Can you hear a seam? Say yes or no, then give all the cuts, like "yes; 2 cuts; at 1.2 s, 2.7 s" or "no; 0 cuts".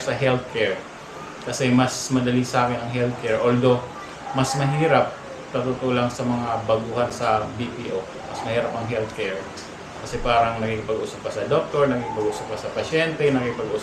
no; 0 cuts